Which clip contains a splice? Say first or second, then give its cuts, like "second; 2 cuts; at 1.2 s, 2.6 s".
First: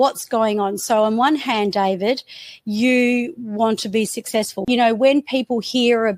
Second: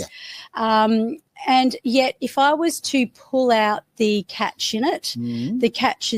first; 1 cut; at 4.6 s